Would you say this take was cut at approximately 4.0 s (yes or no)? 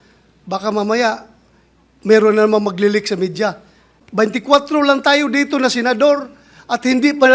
yes